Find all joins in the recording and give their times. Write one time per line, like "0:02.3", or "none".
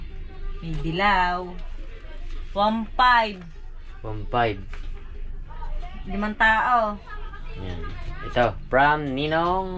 none